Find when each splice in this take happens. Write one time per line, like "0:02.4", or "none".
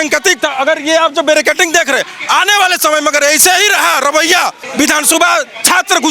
0:04.6